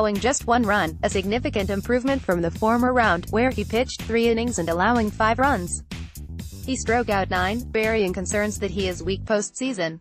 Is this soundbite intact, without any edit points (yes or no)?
yes